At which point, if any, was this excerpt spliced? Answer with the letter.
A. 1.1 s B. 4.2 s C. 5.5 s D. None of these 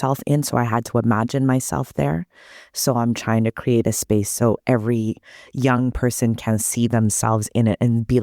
B